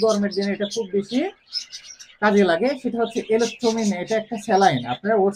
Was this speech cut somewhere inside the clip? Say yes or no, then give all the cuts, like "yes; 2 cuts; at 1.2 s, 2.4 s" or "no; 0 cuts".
no; 0 cuts